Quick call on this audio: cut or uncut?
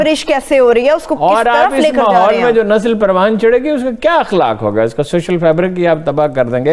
uncut